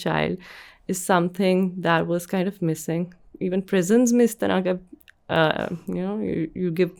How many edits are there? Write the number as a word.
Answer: zero